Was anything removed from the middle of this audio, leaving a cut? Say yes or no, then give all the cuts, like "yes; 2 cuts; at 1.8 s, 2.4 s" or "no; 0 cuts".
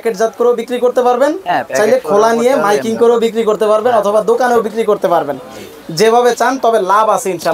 no; 0 cuts